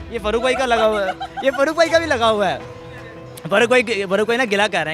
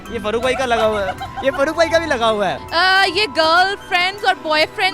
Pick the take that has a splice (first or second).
second